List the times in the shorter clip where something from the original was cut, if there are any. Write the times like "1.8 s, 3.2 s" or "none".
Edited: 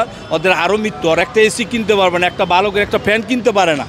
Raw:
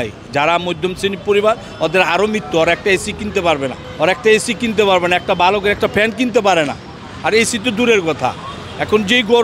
1.2 s